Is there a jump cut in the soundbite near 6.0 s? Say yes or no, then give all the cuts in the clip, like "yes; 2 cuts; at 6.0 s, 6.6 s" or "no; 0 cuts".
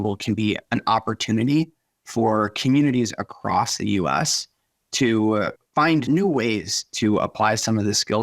yes; 1 cut; at 6.0 s